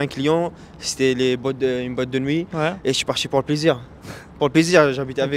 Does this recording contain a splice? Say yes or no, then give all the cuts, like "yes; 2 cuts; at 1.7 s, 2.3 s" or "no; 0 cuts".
no; 0 cuts